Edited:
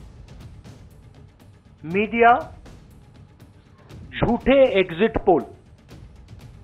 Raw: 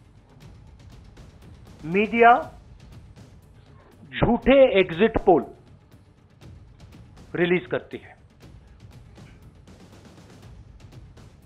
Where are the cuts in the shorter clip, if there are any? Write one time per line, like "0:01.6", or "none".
0:05.7

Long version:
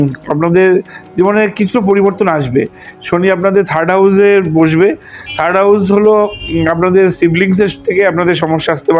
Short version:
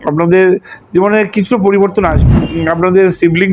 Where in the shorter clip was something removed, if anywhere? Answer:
0:02.3

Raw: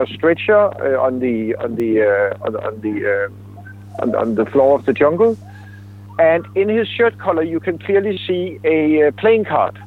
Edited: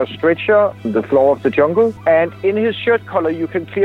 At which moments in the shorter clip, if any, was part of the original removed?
0:00.8
0:02.0

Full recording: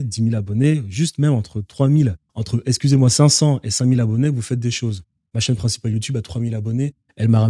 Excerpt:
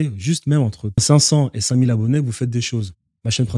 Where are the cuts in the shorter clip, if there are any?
0:01.0

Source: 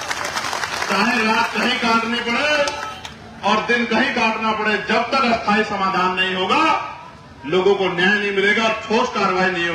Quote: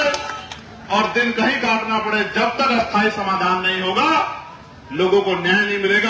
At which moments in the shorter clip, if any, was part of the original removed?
none

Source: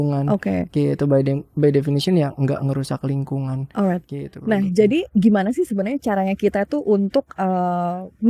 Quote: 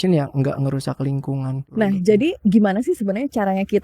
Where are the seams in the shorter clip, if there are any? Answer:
0:01.6

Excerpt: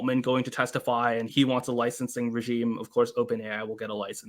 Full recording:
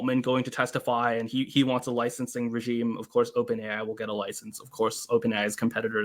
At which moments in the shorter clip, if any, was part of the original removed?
0:01.3

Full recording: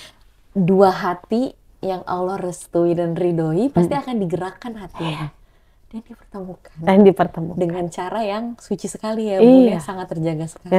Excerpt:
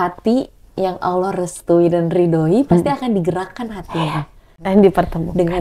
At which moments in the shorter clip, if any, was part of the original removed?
0:04.4

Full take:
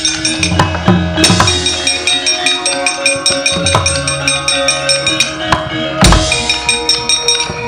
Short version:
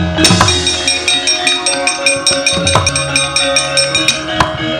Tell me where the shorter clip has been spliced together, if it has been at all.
0:02.9

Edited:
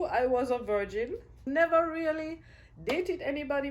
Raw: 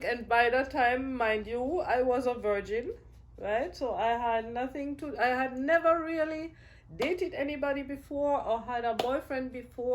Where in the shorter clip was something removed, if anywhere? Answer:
0:01.4

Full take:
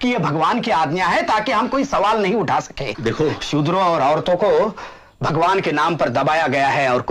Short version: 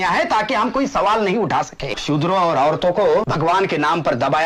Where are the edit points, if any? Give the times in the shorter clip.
0:02.0
0:03.3

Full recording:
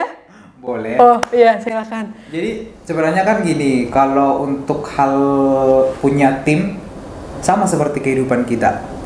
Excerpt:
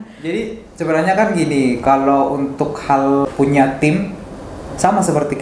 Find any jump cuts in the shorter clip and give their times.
0:03.3

